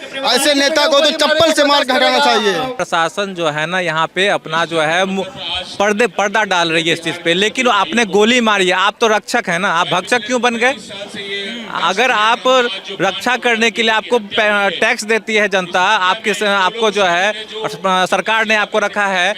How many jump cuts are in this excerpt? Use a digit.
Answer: 1